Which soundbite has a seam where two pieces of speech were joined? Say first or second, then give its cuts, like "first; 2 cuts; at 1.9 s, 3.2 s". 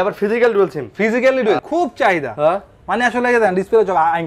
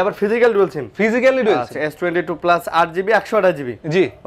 first; 1 cut; at 1.6 s